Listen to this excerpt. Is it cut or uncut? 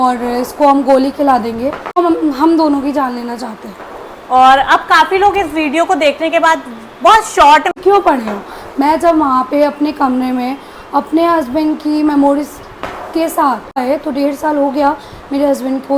cut